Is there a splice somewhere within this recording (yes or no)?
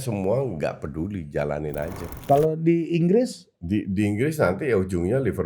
yes